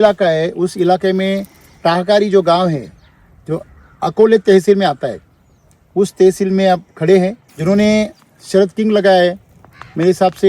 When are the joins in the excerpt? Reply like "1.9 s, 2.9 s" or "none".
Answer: 7.5 s